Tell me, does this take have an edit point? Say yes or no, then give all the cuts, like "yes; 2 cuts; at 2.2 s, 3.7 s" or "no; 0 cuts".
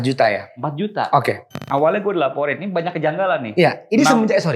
yes; 1 cut; at 1.5 s